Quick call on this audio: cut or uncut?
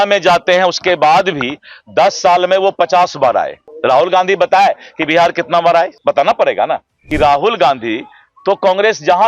cut